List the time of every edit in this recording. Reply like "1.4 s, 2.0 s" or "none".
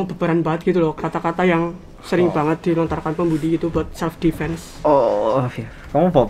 none